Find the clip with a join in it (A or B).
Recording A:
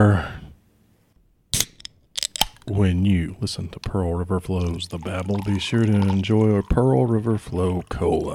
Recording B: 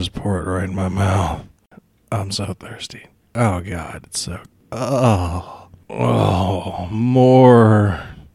A